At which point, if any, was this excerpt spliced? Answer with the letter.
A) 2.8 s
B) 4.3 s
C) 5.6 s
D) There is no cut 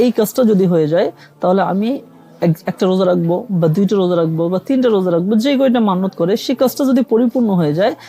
D